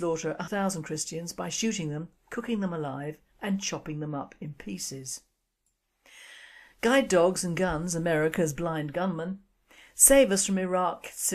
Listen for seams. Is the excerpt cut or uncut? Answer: cut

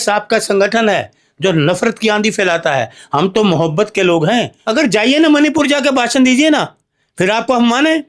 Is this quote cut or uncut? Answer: cut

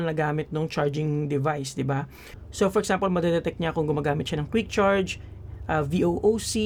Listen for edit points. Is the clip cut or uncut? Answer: uncut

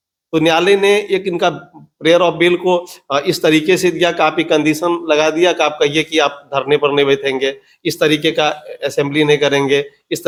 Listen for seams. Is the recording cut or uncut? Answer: uncut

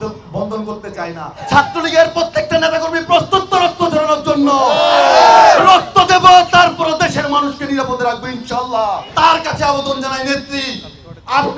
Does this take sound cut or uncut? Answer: cut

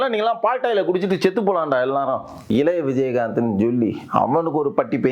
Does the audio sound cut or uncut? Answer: cut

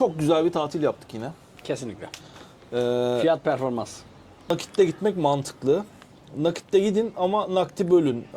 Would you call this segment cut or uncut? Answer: cut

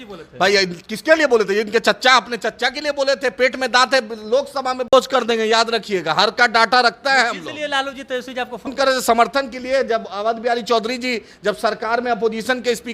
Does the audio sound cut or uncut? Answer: cut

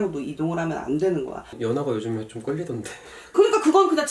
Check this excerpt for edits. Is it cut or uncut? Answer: cut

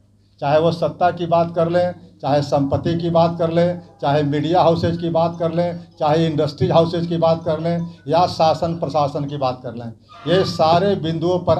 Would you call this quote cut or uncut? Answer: uncut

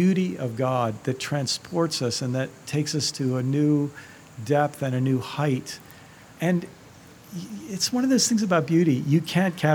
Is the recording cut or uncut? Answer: cut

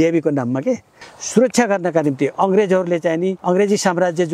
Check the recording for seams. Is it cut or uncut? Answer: cut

